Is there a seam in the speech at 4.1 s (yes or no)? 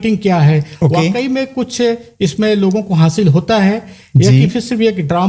no